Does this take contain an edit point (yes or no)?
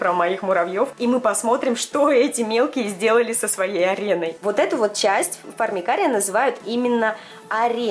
no